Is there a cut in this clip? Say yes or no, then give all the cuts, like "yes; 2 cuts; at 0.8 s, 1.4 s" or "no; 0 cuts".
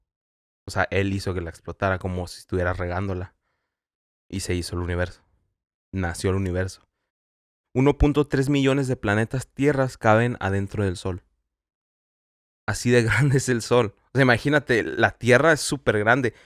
yes; 1 cut; at 7.3 s